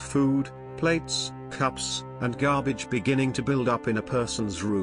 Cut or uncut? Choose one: uncut